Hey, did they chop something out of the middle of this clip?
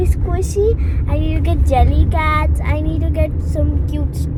no; 0 cuts

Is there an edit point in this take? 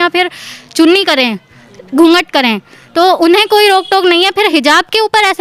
no; 0 cuts

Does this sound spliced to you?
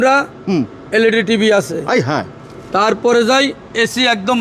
no; 0 cuts

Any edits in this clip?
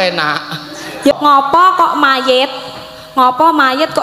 yes; 1 cut; at 1.1 s

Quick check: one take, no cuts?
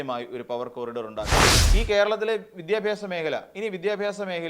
no; 1 cut; at 1.5 s

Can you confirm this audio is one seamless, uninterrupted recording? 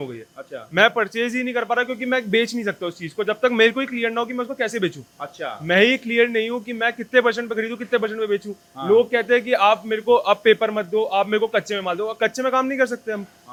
yes; 0 cuts

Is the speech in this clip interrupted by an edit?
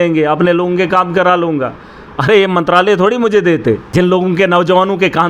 yes; 1 cut; at 3.8 s

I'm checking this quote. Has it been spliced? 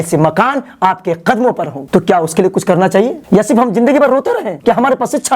yes; 1 cut; at 1.8 s

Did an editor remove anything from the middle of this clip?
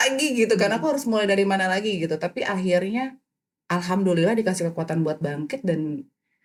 no; 0 cuts

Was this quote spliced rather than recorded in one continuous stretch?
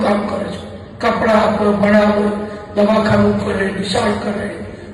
no; 0 cuts

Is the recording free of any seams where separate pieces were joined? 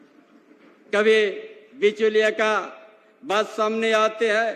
yes; 0 cuts

